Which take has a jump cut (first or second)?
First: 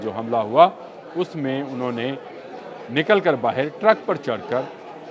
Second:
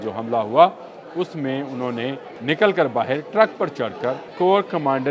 second